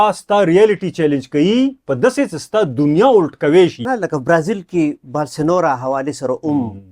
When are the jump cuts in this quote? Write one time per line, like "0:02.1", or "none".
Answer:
0:03.8